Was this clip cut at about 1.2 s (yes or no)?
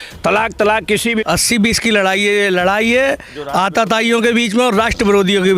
yes